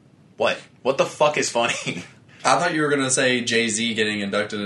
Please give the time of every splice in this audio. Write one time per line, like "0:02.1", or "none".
none